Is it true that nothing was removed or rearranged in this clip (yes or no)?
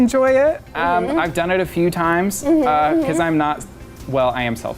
yes